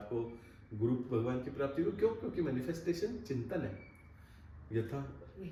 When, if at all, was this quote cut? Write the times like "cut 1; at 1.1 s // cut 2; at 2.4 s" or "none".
none